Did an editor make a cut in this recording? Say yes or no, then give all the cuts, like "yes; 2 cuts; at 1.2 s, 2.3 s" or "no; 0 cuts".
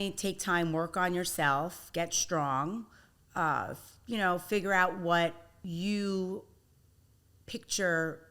yes; 1 cut; at 5.5 s